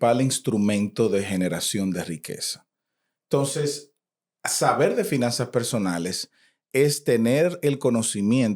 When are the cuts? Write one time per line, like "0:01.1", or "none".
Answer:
none